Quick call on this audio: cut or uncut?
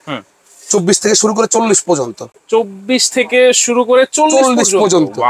uncut